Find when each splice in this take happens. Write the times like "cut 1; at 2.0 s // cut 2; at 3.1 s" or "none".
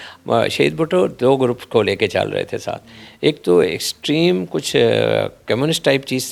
none